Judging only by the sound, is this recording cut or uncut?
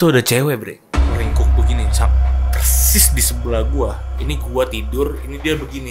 uncut